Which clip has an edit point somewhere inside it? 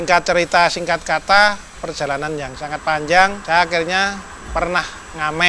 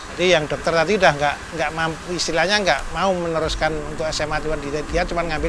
first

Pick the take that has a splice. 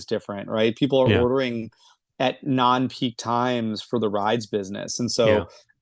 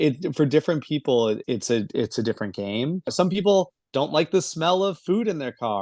second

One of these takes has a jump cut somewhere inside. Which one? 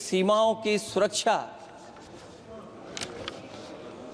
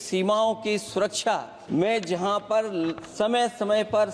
second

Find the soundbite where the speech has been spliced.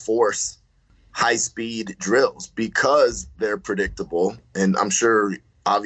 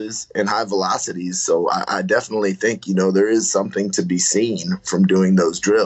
first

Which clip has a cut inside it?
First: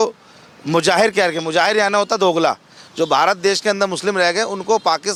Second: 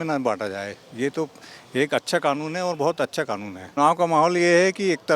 second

